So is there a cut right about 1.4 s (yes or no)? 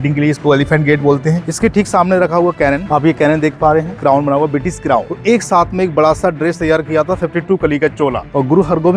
yes